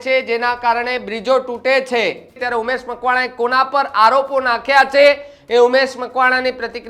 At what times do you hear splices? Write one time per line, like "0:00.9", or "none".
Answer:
0:02.4